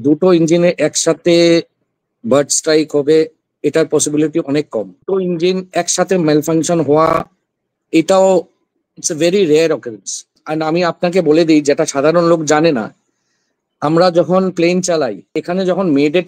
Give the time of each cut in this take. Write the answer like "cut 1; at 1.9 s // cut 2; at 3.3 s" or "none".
cut 1; at 5.0 s // cut 2; at 10.4 s // cut 3; at 15.3 s

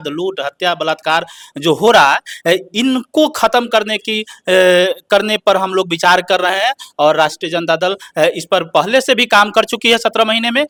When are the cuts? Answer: none

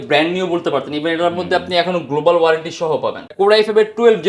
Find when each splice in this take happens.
cut 1; at 3.3 s

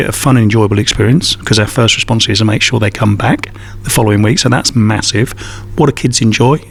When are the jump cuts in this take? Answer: none

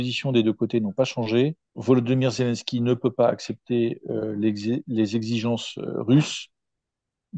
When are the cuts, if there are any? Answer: cut 1; at 1.7 s

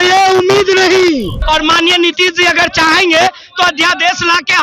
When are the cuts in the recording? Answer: cut 1; at 1.3 s

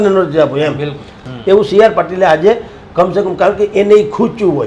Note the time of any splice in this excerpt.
cut 1; at 1.2 s

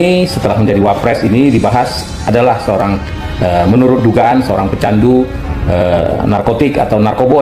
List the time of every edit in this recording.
none

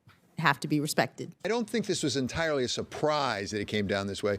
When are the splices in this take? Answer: cut 1; at 1.4 s

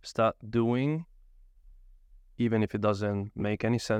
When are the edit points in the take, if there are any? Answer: none

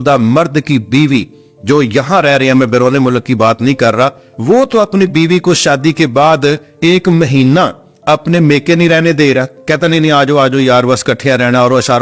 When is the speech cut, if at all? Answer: none

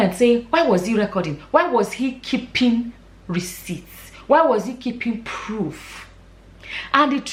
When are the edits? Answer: none

